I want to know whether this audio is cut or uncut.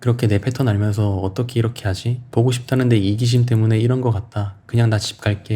cut